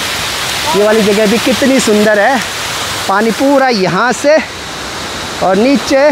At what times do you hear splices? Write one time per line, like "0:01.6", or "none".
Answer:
none